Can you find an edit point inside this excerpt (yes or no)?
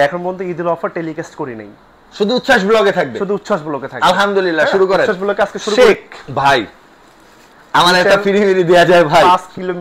yes